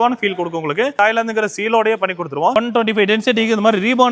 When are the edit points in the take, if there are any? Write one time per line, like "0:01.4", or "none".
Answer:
0:01.0
0:02.5